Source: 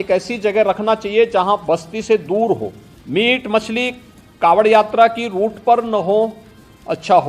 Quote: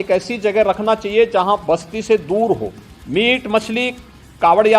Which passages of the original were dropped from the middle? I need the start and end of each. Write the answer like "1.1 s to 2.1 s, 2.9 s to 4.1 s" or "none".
none